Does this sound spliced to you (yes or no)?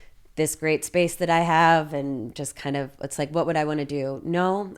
no